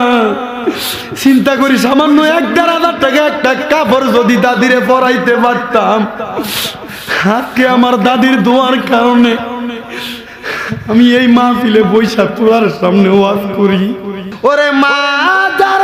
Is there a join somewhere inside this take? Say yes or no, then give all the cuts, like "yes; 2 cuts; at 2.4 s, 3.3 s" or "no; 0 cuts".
yes; 1 cut; at 14.2 s